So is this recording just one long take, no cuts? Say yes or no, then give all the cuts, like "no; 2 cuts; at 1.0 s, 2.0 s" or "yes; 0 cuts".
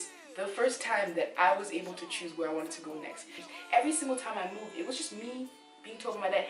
no; 1 cut; at 3.4 s